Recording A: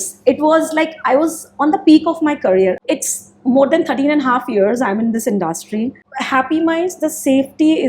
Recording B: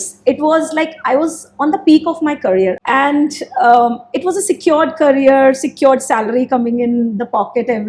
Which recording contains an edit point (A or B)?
A